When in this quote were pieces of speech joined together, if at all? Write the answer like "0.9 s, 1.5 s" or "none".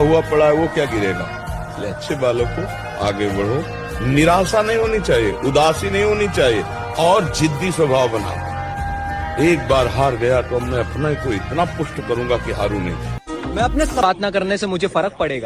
none